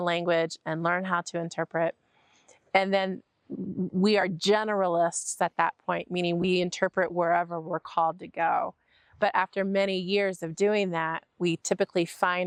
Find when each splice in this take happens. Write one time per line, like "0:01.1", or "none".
none